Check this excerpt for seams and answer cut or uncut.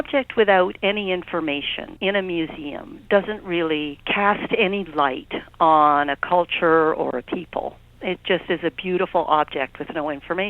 cut